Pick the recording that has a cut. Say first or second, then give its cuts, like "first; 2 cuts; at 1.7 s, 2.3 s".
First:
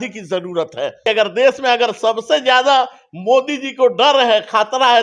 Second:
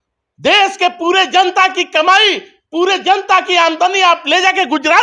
first; 1 cut; at 1.1 s